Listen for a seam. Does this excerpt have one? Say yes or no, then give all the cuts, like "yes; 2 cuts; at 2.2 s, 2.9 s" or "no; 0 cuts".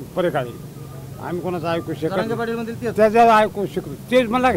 no; 0 cuts